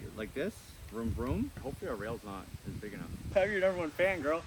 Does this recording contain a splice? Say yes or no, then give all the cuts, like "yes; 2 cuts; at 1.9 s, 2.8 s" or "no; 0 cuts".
yes; 1 cut; at 1.5 s